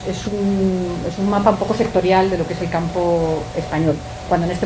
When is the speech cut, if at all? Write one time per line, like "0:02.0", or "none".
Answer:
0:01.5

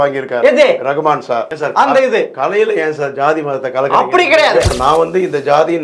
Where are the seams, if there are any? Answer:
0:01.5
0:04.7

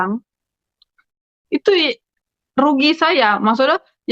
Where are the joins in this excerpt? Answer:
none

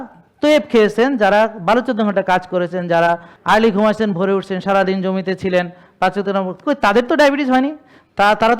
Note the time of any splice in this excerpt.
0:03.3

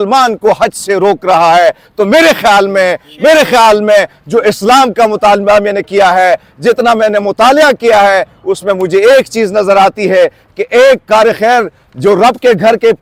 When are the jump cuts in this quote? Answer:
none

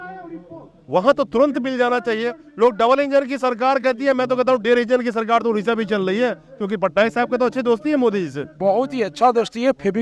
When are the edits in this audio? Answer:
none

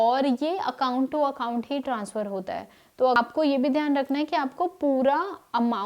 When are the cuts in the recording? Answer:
0:03.2

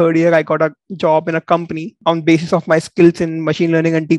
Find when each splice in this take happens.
none

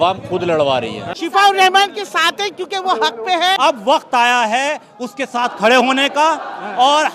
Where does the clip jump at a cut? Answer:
0:01.1
0:03.6

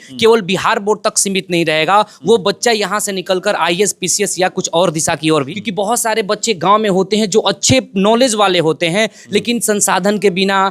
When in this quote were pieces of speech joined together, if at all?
0:05.5

